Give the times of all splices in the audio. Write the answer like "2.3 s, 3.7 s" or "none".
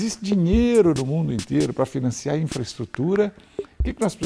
1.7 s